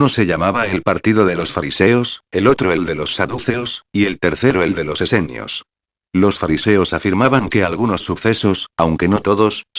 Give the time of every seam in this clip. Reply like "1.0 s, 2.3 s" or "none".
2.6 s